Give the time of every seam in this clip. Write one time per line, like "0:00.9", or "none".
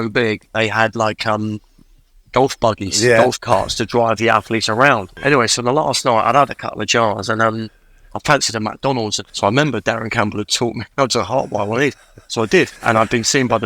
0:05.1
0:09.2
0:12.8